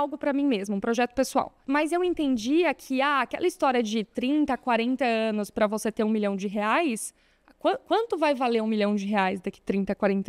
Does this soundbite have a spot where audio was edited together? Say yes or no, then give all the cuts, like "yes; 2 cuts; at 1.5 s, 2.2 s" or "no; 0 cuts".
yes; 1 cut; at 1.6 s